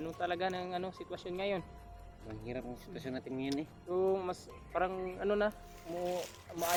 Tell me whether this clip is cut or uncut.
uncut